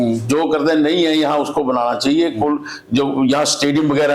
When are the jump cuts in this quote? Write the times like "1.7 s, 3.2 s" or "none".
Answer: none